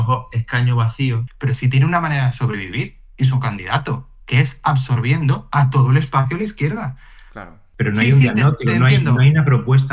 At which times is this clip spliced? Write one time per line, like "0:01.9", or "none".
0:01.3
0:07.6

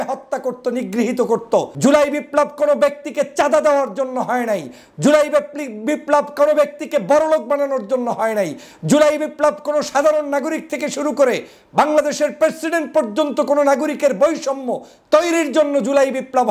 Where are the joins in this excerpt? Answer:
0:01.7

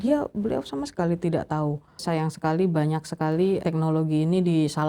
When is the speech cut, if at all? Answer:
0:02.0
0:03.6

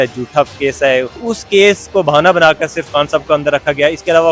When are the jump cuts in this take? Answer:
0:01.1

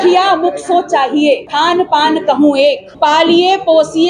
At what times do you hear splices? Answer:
0:01.5
0:02.9

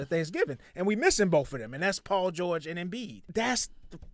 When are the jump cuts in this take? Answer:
0:03.2

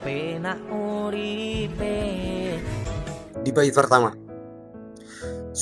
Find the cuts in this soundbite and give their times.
0:03.0

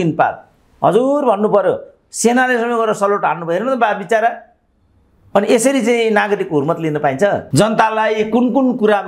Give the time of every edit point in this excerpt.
0:07.4

